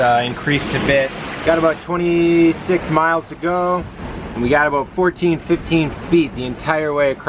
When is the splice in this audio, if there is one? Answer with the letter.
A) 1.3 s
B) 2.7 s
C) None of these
A